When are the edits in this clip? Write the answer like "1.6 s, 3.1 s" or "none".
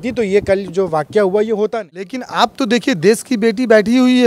2.2 s